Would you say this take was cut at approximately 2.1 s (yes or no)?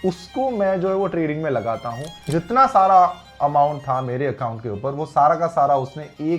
yes